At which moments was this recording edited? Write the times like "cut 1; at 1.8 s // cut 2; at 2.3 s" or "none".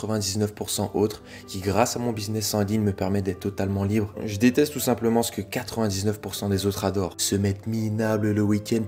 cut 1; at 4.2 s